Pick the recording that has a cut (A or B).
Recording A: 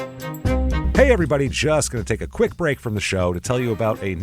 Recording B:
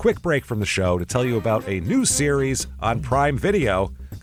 A